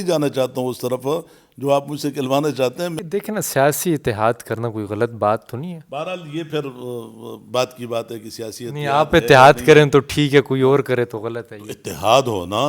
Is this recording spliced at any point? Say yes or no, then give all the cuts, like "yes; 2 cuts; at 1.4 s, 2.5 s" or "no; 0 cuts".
yes; 1 cut; at 2.9 s